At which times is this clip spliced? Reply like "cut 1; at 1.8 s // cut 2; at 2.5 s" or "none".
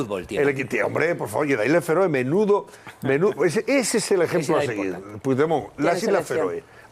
none